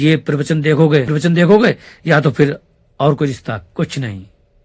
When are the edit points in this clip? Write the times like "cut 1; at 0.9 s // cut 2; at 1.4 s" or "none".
cut 1; at 1.1 s